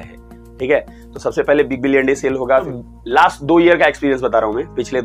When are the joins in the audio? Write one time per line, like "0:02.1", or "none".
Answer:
0:02.8